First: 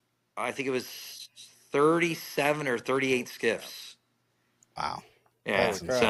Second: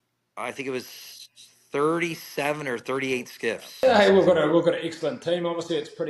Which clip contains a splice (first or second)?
second